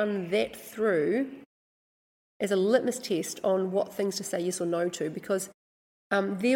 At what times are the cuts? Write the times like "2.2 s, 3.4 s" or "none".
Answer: none